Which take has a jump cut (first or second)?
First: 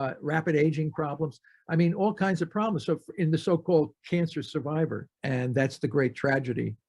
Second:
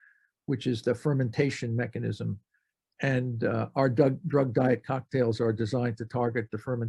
first